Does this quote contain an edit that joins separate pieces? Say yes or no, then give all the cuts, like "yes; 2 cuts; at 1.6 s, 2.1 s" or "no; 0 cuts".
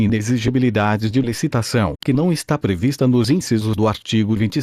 no; 0 cuts